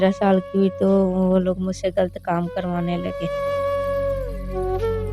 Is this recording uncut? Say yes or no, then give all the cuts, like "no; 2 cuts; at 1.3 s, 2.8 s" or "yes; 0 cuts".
yes; 0 cuts